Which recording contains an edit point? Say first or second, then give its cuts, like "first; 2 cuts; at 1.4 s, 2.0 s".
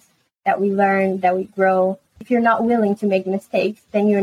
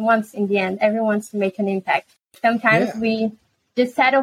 first; 1 cut; at 2.1 s